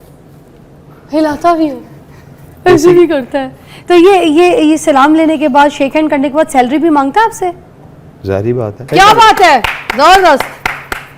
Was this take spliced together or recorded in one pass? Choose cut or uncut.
cut